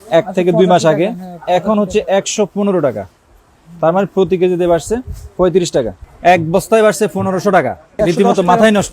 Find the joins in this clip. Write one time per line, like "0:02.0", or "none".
0:06.0
0:07.9